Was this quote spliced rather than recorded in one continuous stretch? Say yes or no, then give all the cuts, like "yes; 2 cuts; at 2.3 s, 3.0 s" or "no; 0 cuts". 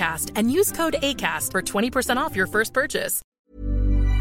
yes; 1 cut; at 3.3 s